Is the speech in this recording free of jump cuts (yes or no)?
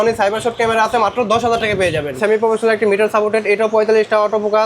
no